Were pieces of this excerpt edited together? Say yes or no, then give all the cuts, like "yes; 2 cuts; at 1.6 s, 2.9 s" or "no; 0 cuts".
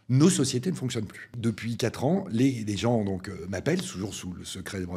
yes; 1 cut; at 1.3 s